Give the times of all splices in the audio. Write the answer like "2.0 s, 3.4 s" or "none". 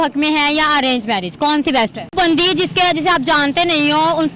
2.1 s